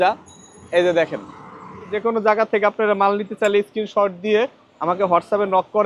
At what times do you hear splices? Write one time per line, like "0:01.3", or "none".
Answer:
0:01.9